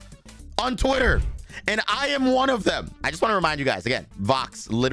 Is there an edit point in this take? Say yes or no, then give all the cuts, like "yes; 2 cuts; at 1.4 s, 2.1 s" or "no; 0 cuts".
yes; 1 cut; at 2.9 s